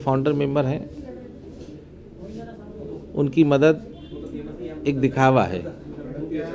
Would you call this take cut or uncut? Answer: uncut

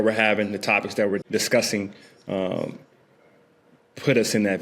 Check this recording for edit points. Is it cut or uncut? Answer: cut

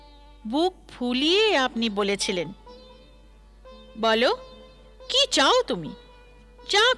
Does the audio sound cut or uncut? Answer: uncut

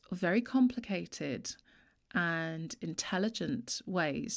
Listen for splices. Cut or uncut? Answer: uncut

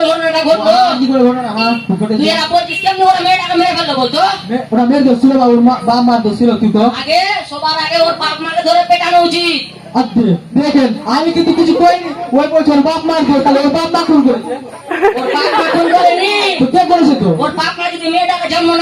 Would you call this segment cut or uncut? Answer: uncut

